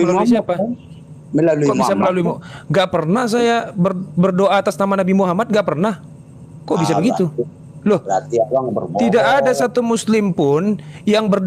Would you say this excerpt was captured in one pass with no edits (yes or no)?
yes